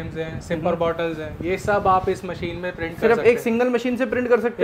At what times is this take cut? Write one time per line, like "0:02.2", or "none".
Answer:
none